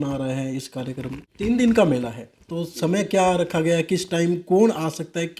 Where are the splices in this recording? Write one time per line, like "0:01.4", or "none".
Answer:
0:01.4